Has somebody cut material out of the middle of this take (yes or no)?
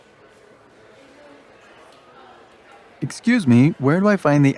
no